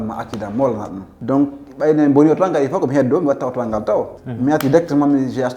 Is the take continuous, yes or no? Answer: no